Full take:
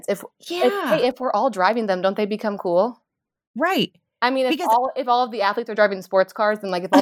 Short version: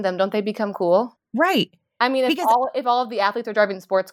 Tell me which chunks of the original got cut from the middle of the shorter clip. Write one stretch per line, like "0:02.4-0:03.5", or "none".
0:03.0-0:03.4